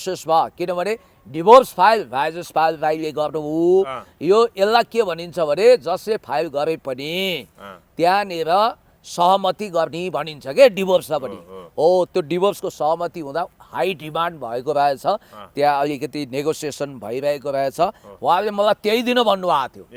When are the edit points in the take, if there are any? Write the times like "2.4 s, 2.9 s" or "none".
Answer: none